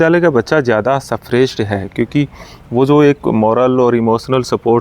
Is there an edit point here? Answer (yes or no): no